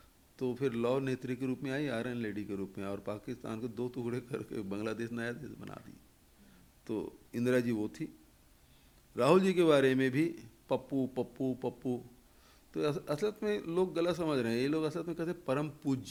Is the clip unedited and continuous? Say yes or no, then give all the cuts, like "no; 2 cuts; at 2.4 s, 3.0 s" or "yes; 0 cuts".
yes; 0 cuts